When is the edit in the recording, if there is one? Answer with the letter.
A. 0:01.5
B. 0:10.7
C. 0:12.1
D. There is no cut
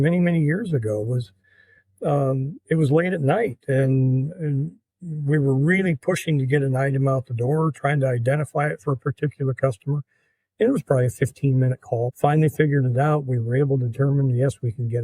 C